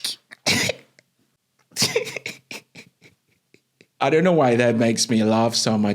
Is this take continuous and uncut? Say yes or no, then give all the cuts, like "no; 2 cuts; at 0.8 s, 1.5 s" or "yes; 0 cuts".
no; 1 cut; at 3.9 s